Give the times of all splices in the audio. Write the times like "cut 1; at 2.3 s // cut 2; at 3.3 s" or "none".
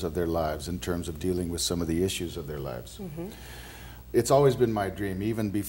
cut 1; at 2.2 s

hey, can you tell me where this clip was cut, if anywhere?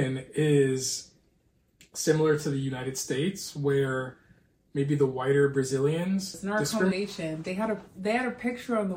cut 1; at 6.9 s

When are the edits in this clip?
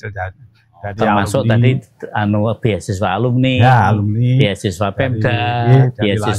none

